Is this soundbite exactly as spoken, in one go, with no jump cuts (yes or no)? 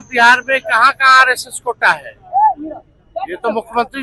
yes